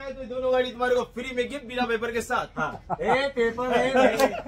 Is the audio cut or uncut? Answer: uncut